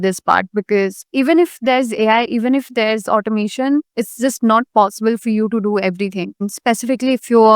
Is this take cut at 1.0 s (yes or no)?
yes